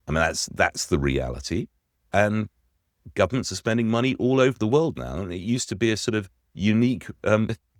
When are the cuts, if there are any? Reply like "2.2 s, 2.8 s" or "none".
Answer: none